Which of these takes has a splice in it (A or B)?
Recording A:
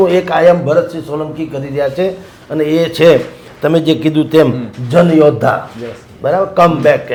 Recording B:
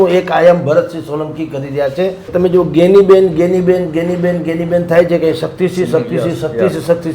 B